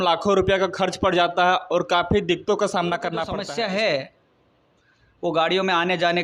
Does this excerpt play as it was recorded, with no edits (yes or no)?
no